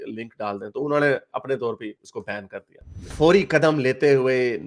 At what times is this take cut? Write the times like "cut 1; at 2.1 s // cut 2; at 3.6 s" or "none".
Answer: cut 1; at 3.0 s